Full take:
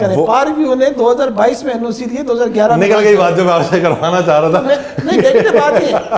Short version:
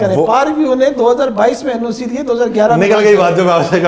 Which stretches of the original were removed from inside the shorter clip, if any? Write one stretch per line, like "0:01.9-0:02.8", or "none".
none

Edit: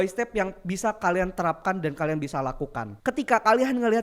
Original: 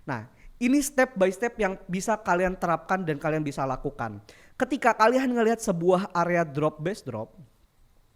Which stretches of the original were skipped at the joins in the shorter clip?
0:04.1-0:04.4

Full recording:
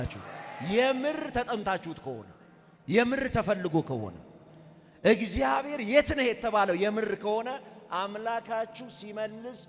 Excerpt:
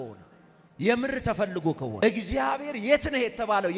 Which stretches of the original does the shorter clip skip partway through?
0:04.1-0:05.1

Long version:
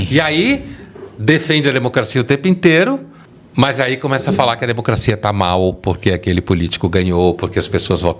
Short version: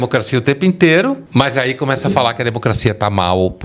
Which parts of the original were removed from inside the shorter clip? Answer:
0:03.1-0:03.5

